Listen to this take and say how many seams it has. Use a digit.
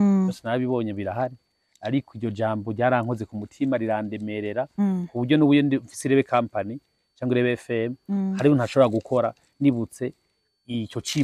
0